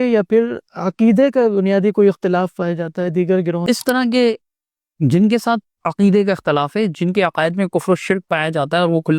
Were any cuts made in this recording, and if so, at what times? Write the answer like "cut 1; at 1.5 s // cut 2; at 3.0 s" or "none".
cut 1; at 3.6 s